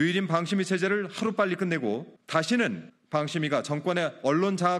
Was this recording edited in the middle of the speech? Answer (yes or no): yes